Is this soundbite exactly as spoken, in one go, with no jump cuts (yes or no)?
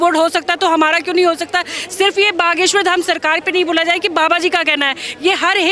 yes